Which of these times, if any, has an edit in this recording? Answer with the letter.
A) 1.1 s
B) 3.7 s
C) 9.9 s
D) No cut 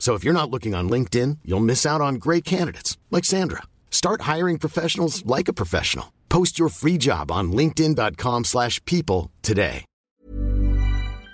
C